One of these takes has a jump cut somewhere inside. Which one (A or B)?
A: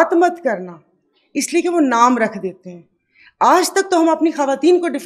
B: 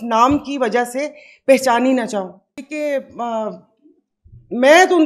B